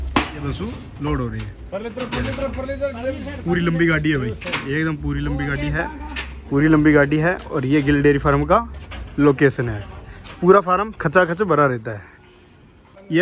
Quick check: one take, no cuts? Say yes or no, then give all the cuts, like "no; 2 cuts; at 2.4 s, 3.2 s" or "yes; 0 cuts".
yes; 0 cuts